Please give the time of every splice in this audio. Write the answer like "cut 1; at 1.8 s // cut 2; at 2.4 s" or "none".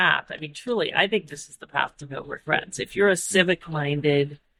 none